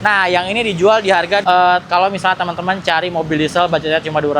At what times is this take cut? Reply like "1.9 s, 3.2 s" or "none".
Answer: 1.4 s